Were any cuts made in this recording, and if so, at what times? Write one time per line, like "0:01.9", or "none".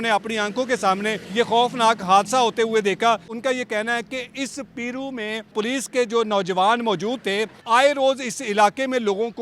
0:01.2
0:03.3
0:05.5
0:07.5

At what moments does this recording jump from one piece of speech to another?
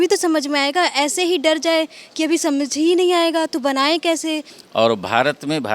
0:04.5

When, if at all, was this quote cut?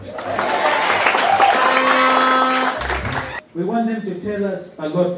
0:03.3

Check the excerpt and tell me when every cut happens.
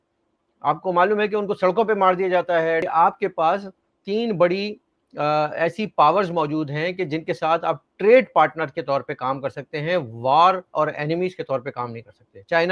0:02.8

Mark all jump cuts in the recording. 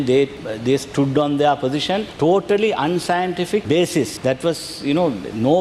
none

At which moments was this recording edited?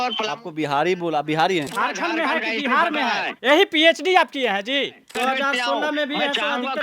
0:01.7
0:05.0

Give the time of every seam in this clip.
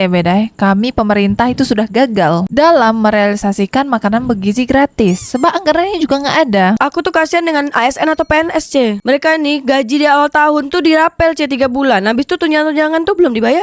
0:06.8
0:09.0

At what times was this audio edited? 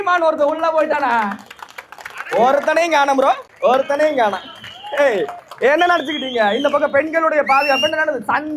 0:03.5
0:05.4

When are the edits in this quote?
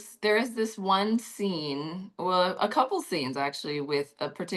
none

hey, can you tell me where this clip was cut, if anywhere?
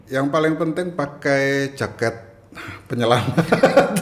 none

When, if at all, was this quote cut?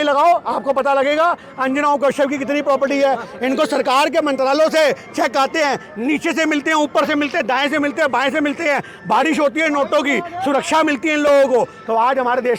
none

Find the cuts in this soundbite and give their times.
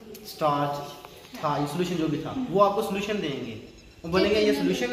none

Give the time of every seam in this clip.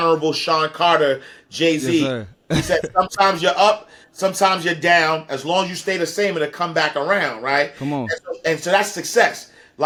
none

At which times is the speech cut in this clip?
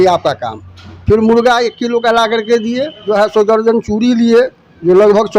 0:03.0

